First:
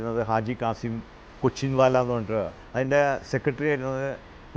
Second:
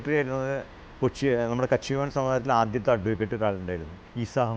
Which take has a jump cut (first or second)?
first